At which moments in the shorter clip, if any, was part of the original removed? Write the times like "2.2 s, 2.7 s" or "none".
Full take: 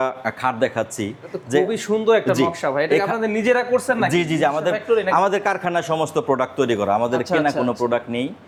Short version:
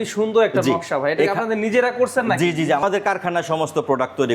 2.8 s